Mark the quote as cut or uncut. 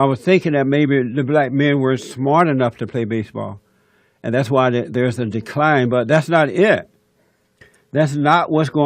cut